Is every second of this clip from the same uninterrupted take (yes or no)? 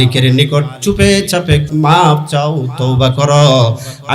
no